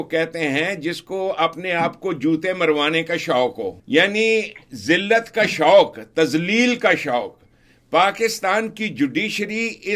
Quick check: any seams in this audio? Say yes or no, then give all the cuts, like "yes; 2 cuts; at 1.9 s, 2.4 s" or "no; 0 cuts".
yes; 1 cut; at 3.8 s